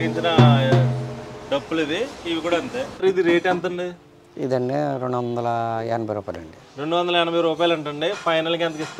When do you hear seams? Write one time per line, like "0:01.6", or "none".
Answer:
0:03.0